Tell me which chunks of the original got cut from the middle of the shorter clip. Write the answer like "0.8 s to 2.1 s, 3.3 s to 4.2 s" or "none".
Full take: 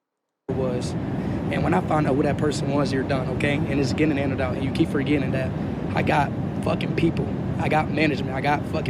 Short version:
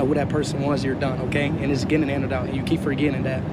none